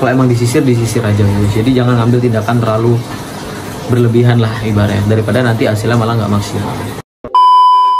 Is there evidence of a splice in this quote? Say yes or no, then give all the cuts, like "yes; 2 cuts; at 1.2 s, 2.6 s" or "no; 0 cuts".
yes; 1 cut; at 7.1 s